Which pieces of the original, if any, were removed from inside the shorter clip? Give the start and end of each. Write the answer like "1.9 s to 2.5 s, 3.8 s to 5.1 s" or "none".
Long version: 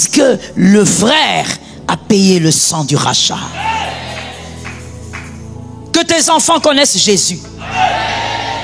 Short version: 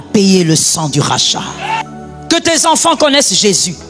3.8 s to 5.5 s